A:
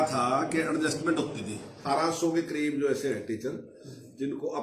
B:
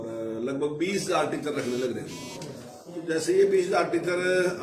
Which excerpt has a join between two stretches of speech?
A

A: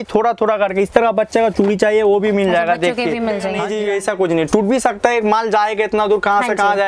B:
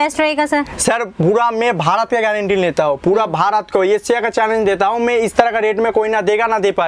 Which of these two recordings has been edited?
A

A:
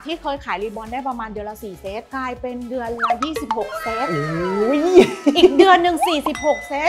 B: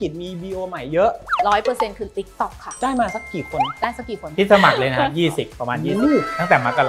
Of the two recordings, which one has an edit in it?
B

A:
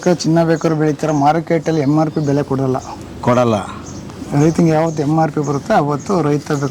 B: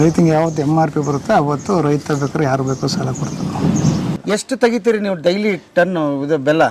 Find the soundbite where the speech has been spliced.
B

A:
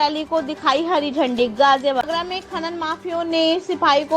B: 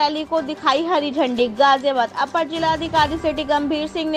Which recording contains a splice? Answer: A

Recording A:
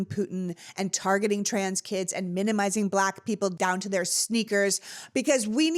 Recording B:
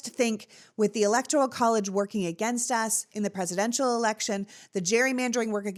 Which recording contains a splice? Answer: A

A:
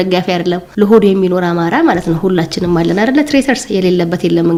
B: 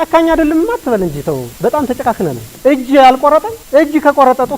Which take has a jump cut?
B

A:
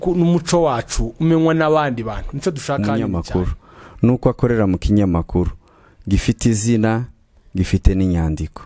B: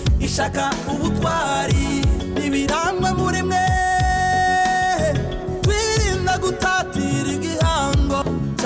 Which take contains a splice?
A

